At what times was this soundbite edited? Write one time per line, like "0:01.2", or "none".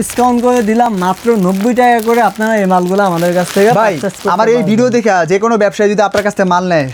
none